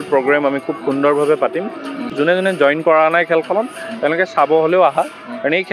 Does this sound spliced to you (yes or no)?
yes